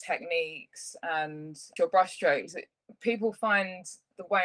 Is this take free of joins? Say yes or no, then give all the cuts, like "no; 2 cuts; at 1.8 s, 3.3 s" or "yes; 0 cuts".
no; 1 cut; at 1.7 s